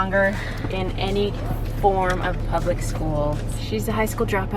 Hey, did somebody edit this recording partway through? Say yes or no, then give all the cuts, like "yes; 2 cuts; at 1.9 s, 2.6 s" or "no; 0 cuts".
yes; 1 cut; at 3.6 s